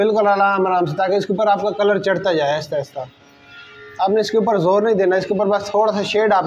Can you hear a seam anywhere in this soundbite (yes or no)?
no